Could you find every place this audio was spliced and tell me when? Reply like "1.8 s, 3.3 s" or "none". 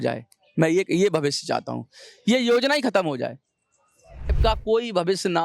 4.3 s